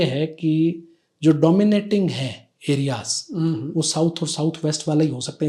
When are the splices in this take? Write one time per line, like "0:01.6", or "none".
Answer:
none